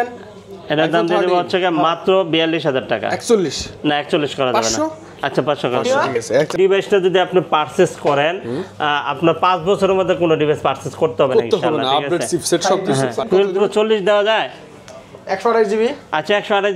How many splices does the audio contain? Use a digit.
2